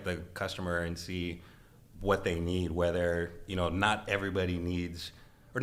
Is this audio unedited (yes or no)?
yes